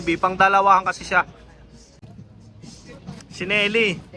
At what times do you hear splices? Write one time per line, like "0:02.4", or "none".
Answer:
0:02.0